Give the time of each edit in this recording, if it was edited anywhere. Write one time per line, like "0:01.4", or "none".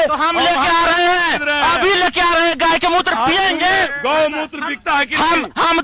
0:03.9